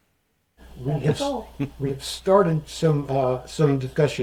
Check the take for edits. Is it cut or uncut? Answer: uncut